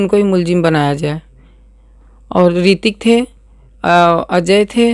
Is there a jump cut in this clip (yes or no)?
no